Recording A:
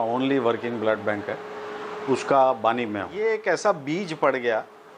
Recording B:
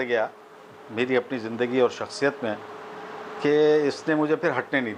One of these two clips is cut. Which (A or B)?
A